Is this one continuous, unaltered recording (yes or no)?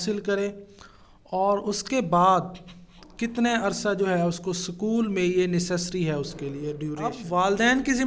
no